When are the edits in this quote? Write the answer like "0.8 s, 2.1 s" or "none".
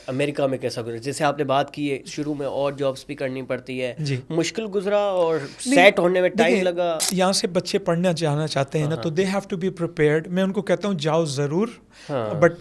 none

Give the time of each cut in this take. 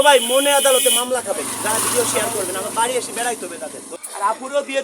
3.9 s

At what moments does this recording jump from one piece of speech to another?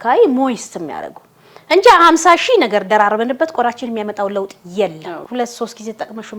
5.1 s

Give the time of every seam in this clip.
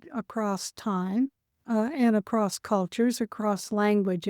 1.5 s

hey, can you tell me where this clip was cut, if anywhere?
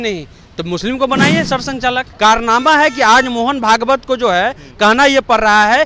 2.1 s

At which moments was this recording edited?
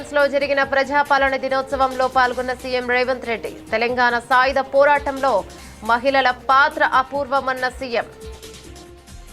none

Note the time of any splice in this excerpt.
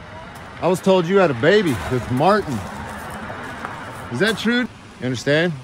2.7 s, 4.7 s

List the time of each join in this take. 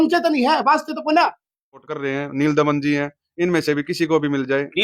1.9 s

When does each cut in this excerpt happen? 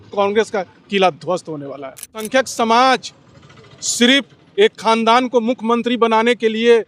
2.3 s

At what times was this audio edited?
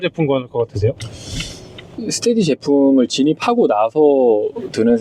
1.9 s

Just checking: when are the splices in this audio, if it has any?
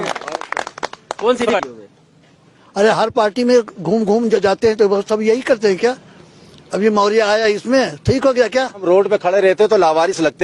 1.8 s, 8.8 s

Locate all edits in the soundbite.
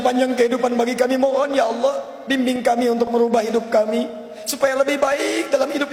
none

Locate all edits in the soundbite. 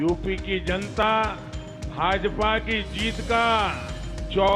1.0 s

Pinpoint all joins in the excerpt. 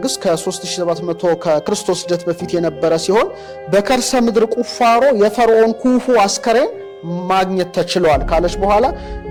none

